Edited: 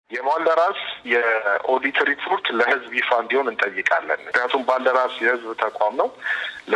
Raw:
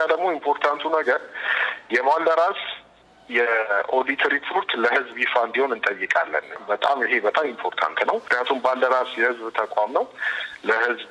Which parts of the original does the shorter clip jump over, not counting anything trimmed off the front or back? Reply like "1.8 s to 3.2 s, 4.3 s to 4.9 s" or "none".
2.7 s to 3.2 s, 6.6 s to 8.3 s